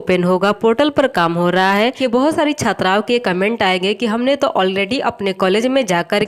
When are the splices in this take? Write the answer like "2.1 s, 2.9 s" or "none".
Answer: 1.9 s